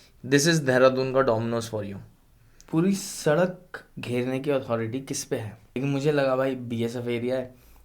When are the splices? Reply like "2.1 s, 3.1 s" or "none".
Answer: 2.5 s